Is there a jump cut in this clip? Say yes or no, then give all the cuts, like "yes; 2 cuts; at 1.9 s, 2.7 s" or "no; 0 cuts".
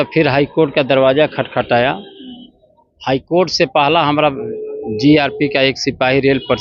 no; 0 cuts